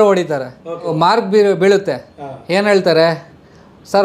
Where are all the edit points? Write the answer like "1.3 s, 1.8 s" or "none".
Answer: 0.9 s

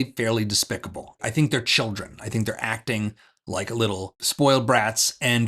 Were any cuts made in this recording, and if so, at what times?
1.2 s

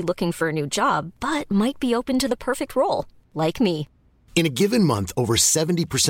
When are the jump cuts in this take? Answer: none

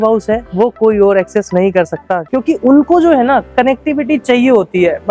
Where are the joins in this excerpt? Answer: 2.2 s

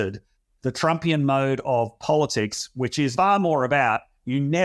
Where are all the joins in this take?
3.1 s

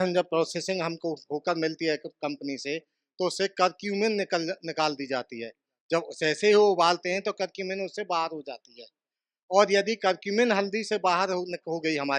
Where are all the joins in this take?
none

